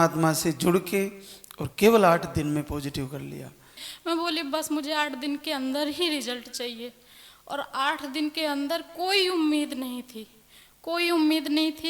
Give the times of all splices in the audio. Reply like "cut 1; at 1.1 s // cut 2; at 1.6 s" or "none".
cut 1; at 3.8 s